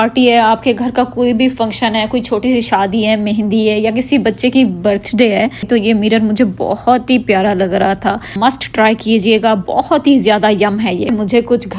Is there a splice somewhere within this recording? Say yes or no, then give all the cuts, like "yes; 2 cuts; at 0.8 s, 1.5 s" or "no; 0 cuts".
yes; 3 cuts; at 5.6 s, 8.4 s, 11.1 s